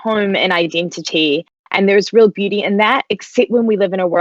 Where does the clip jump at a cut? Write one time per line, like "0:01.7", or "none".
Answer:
none

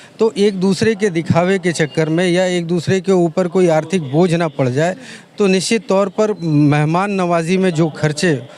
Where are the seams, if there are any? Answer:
none

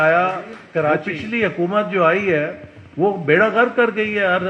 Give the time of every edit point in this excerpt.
0:01.1

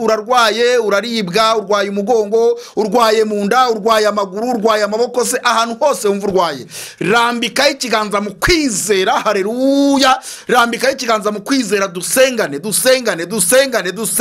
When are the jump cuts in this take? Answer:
none

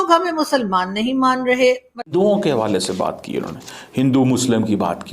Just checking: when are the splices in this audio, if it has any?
0:02.1

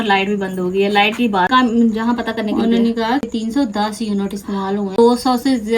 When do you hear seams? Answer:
0:01.5
0:03.2
0:05.0

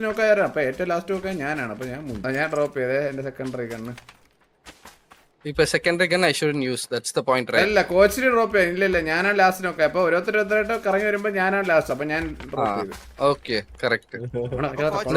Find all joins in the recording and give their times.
0:02.2

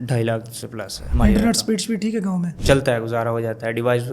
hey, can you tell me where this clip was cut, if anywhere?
0:01.1
0:02.6

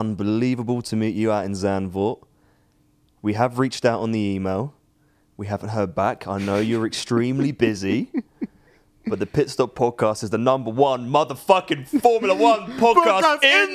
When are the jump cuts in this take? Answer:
none

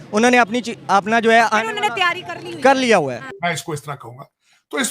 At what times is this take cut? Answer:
0:03.4

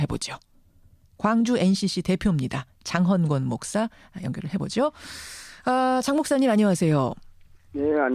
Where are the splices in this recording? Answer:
0:05.1

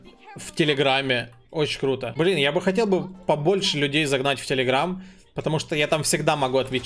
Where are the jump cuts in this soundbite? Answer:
0:02.1

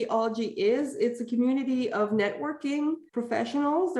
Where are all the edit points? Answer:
0:03.0

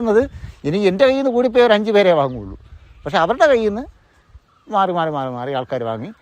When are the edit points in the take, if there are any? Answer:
none

